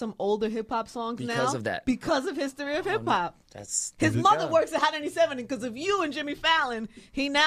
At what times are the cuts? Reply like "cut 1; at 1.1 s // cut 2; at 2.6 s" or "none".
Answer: none